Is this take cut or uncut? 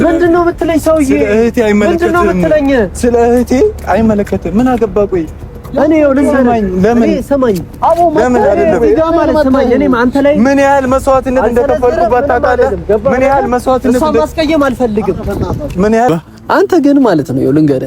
cut